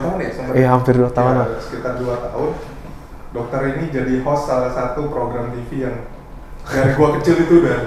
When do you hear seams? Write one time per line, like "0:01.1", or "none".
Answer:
none